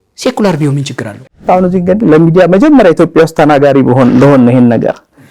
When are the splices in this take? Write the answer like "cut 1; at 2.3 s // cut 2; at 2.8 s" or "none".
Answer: cut 1; at 1.4 s

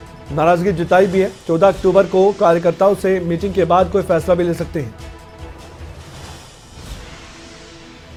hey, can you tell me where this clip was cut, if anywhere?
none

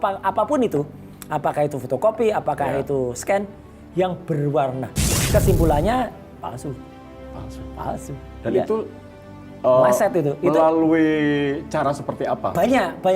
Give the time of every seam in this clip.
cut 1; at 5.1 s

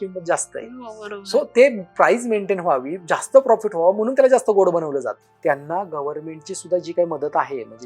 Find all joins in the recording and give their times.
cut 1; at 5.3 s

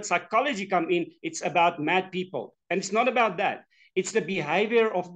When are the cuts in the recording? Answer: none

